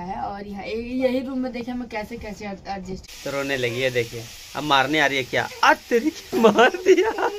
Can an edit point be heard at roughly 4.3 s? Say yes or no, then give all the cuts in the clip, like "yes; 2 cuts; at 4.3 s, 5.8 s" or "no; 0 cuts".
no; 1 cut; at 3.1 s